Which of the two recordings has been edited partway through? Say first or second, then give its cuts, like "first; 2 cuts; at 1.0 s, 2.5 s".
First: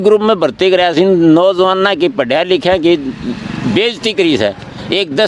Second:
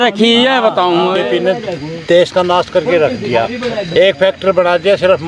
second; 2 cuts; at 1.2 s, 3.8 s